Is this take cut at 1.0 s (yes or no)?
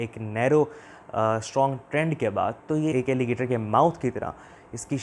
no